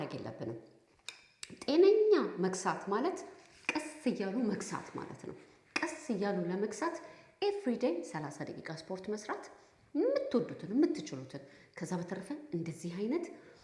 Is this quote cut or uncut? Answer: uncut